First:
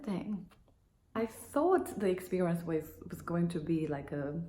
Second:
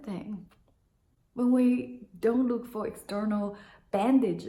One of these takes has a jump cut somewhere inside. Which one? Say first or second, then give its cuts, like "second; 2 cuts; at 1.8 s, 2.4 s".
first; 1 cut; at 1.1 s